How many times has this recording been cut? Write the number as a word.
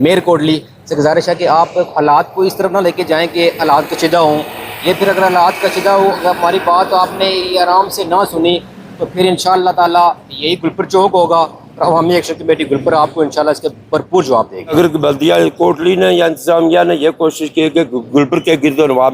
one